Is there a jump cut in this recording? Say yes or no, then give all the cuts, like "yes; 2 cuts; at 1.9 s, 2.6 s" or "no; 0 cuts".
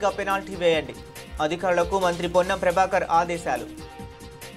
no; 0 cuts